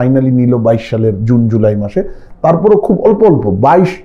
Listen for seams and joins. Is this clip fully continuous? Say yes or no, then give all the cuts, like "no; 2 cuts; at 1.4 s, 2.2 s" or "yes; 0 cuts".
yes; 0 cuts